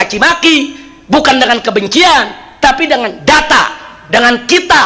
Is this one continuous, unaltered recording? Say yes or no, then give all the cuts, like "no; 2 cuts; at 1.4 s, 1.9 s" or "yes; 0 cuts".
yes; 0 cuts